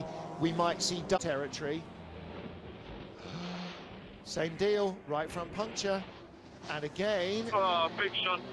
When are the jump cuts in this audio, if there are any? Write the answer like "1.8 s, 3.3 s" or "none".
1.3 s